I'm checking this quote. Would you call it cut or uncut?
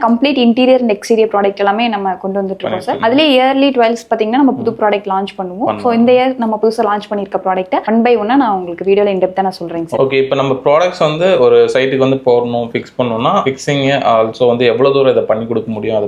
uncut